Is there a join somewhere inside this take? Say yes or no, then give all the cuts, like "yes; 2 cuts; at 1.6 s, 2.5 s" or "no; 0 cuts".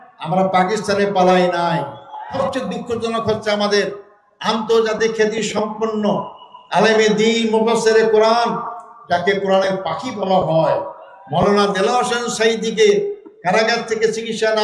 yes; 1 cut; at 2.3 s